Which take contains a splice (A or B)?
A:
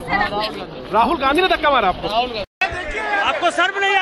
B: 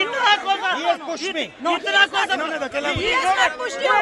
A